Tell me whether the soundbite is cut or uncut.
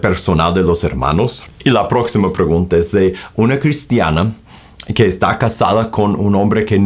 cut